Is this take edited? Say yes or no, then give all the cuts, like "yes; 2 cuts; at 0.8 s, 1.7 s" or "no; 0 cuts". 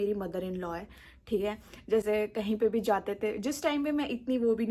no; 0 cuts